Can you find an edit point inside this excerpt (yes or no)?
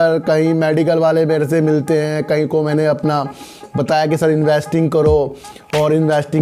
no